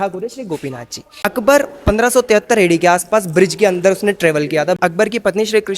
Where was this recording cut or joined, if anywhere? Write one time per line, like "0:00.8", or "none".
0:01.2
0:04.8